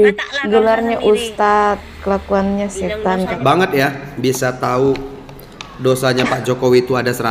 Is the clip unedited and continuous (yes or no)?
no